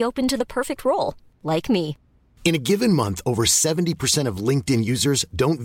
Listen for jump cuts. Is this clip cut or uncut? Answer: uncut